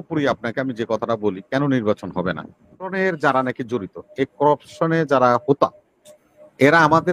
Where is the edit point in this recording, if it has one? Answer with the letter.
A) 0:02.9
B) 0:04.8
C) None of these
A